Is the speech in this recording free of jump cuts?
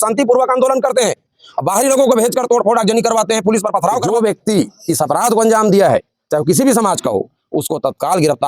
no; 1 cut; at 4.0 s

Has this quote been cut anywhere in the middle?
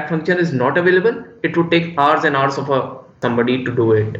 yes; 1 cut; at 3.2 s

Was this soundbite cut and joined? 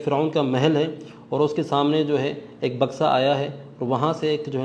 no; 0 cuts

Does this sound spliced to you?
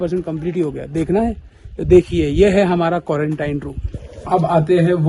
yes; 1 cut; at 4.1 s

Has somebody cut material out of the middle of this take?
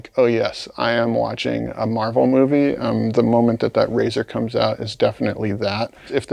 no; 0 cuts

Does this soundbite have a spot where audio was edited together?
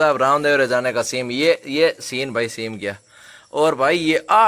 no; 0 cuts

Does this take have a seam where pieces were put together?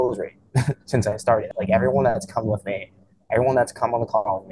yes; 1 cut; at 1.5 s

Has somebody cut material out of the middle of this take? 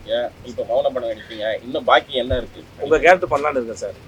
no; 0 cuts

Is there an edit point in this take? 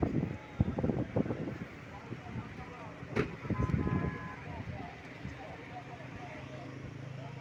no; 0 cuts

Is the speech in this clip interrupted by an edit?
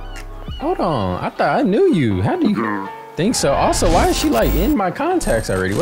no; 0 cuts

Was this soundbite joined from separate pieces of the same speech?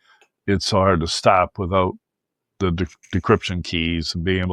no; 0 cuts

